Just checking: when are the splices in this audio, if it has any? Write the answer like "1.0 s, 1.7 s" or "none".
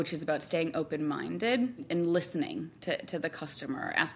1.9 s